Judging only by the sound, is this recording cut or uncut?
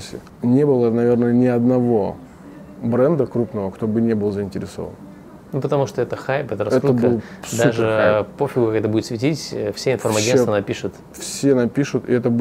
uncut